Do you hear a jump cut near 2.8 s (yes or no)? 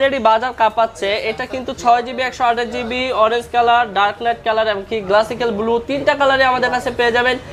no